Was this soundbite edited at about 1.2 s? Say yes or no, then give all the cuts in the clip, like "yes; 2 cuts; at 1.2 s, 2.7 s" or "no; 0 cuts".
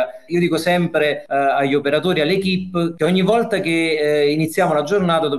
yes; 2 cuts; at 1.2 s, 2.9 s